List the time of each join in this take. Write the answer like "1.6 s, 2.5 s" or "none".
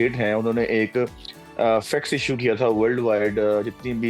none